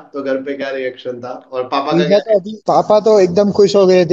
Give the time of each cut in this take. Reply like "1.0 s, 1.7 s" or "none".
2.5 s